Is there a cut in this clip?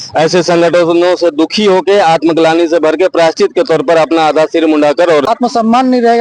yes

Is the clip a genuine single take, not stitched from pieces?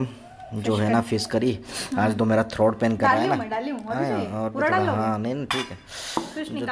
yes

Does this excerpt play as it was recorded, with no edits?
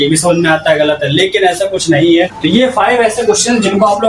no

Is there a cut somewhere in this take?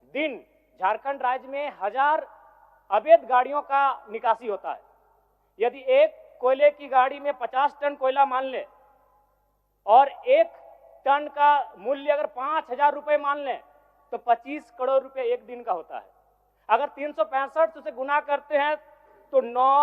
yes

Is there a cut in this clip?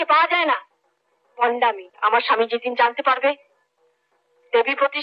yes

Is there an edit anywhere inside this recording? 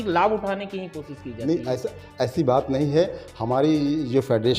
no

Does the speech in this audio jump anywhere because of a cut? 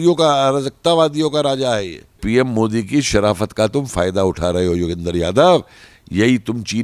yes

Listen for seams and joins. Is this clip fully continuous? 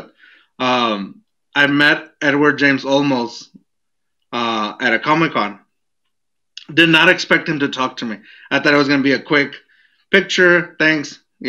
yes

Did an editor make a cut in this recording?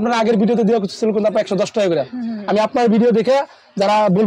no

